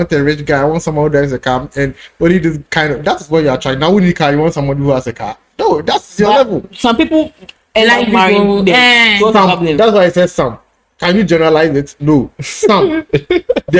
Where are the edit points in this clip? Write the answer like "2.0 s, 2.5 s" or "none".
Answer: none